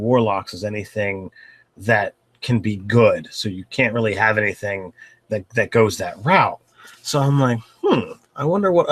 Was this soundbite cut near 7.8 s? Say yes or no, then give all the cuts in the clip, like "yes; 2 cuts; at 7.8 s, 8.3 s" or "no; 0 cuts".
yes; 1 cut; at 7.8 s